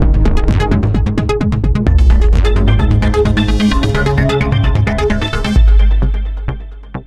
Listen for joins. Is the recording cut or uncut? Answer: uncut